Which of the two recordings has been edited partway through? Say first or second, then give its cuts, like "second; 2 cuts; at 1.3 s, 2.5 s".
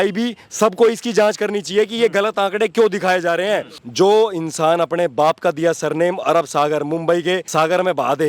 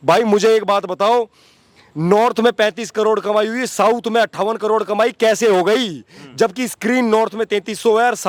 first; 2 cuts; at 3.8 s, 7.5 s